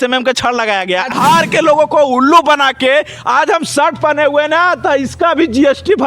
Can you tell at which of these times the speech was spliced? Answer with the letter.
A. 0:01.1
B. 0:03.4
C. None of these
A